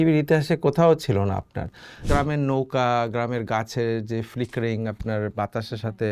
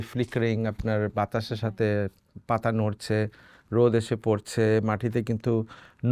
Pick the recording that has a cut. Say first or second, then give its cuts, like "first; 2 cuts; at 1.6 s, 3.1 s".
first; 1 cut; at 2.1 s